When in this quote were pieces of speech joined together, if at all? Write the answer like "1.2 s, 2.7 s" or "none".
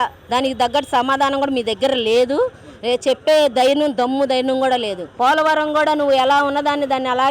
5.1 s